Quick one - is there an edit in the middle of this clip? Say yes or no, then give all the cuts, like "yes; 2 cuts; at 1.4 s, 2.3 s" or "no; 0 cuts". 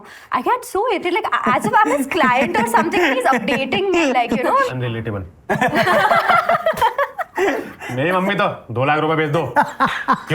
no; 0 cuts